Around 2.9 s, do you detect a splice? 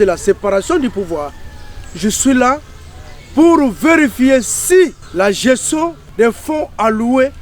no; 2 cuts; at 5.0 s, 6.0 s

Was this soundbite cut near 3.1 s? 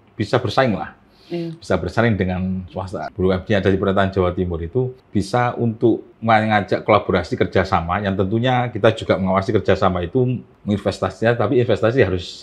yes; 4 cuts; at 3.1 s, 5.0 s, 6.1 s, 10.5 s

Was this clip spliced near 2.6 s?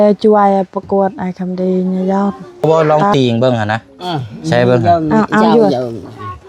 yes; 1 cut; at 2.6 s

